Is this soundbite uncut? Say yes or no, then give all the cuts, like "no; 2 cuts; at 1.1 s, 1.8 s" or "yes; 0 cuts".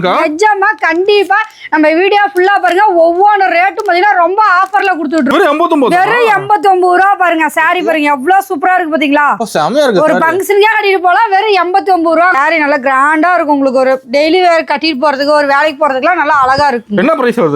no; 2 cuts; at 5.3 s, 12.3 s